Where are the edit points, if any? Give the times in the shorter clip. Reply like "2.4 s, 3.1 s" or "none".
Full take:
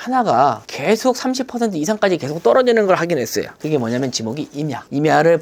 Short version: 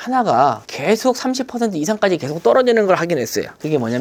none